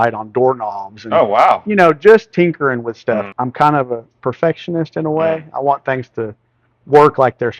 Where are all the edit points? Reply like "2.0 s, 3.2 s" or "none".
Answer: 3.3 s